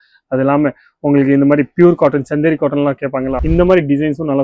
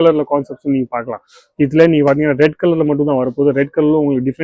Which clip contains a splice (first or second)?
first